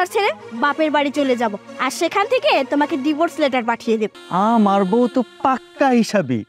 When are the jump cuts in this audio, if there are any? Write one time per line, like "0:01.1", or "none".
0:04.2